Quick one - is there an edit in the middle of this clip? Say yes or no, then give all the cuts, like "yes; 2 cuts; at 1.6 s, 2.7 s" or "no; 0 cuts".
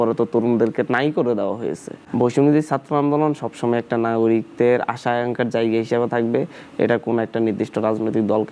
yes; 1 cut; at 1.9 s